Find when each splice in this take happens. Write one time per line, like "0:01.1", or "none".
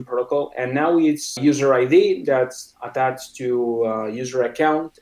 0:01.4